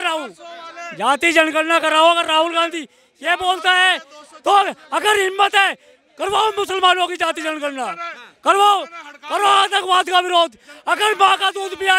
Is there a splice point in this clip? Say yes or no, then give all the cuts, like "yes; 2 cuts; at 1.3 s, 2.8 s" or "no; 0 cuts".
no; 0 cuts